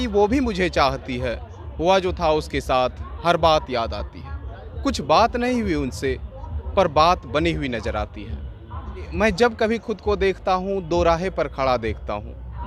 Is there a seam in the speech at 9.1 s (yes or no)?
yes